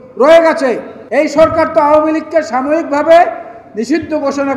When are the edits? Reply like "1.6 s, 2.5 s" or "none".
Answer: 0.9 s

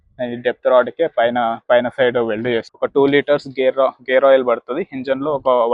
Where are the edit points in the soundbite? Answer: 2.7 s

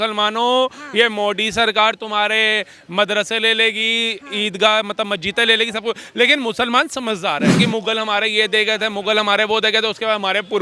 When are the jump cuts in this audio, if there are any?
7.6 s

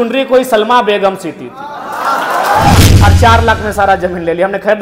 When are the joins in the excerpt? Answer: 2.8 s

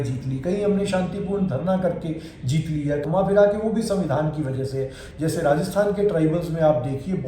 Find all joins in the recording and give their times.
3.0 s, 5.0 s

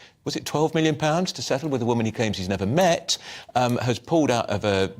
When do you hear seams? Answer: 2.3 s

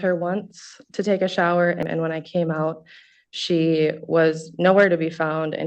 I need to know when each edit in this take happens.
1.8 s

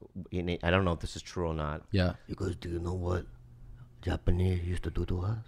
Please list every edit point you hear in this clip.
2.3 s

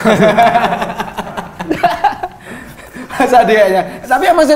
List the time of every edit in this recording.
none

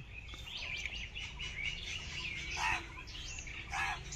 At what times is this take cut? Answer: none

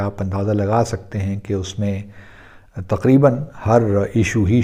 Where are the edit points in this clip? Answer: none

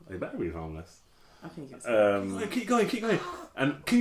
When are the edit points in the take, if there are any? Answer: 2.5 s

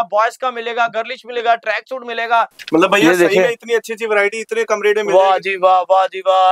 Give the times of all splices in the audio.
none

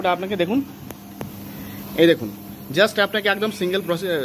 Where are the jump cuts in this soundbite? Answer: none

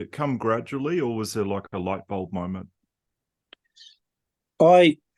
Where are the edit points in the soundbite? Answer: none

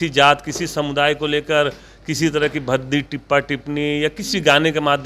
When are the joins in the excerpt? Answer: none

